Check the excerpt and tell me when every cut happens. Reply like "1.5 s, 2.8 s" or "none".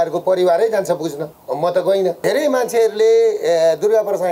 1.3 s, 2.2 s